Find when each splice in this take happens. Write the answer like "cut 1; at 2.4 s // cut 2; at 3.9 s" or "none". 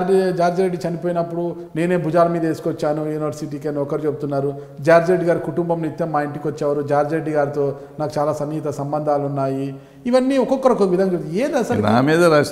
none